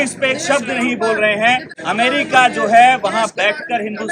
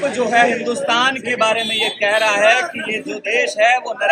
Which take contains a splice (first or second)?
first